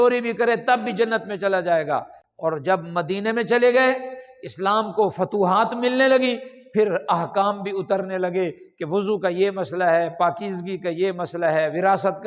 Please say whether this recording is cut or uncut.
uncut